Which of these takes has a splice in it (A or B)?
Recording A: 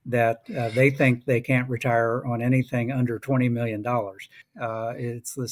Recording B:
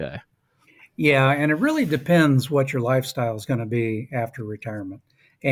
A